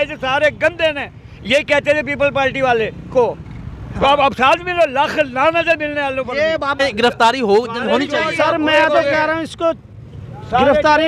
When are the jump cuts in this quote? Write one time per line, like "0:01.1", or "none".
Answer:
0:06.7

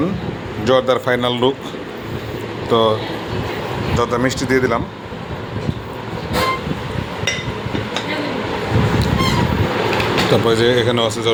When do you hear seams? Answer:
none

